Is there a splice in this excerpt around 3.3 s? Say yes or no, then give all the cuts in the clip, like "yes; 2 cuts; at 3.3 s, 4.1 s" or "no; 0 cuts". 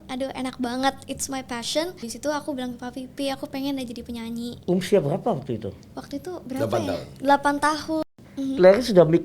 no; 2 cuts; at 2.1 s, 8.1 s